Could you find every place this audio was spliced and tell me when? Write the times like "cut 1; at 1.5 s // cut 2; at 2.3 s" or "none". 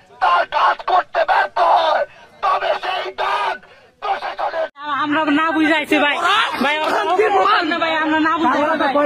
cut 1; at 4.8 s